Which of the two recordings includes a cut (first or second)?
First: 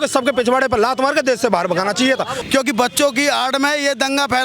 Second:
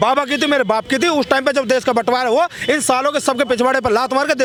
first